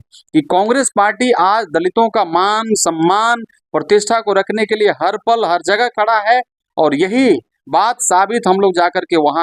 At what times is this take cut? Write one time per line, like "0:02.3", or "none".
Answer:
none

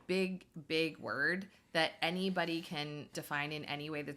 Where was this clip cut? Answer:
0:03.2

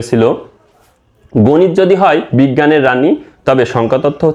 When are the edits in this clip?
none

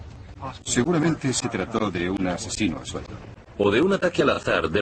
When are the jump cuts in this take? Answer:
0:01.2

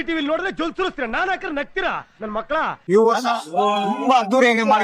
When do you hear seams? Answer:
0:02.7

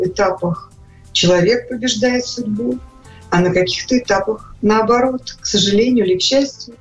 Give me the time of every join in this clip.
none

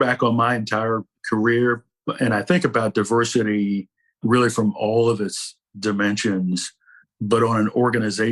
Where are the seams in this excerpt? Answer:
0:01.1
0:01.9
0:07.0

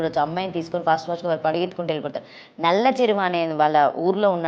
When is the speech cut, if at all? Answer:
none

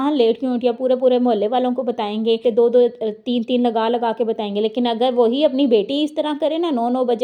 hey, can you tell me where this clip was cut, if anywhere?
0:02.4

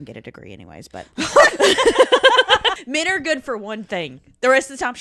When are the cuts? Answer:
0:02.8

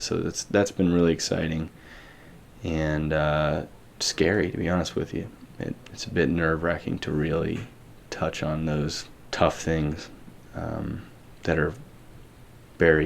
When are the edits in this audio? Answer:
0:09.2

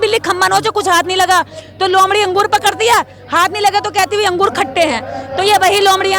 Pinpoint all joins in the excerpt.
none

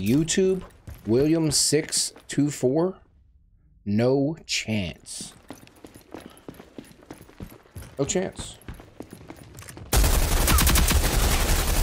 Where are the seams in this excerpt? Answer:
none

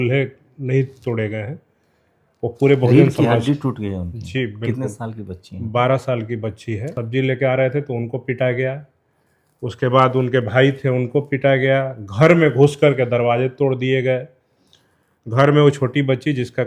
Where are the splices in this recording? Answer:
0:06.9

